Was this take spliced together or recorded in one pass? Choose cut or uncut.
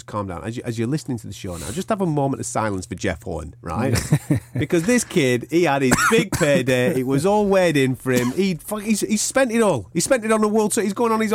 uncut